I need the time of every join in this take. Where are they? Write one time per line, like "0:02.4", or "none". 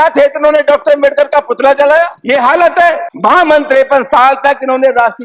0:02.2
0:03.1